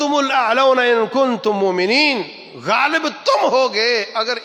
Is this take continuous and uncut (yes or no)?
yes